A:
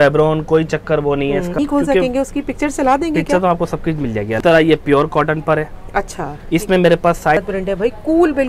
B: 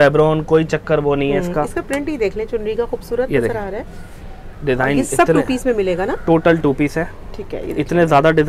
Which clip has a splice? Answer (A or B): A